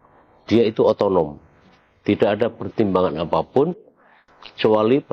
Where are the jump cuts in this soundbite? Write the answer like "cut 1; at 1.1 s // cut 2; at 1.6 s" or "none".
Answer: none

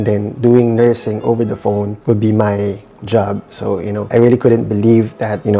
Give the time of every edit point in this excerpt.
cut 1; at 4.0 s

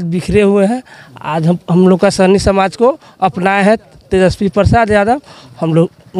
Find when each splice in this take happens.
none

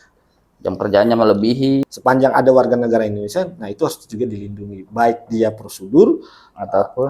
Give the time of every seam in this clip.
cut 1; at 1.9 s

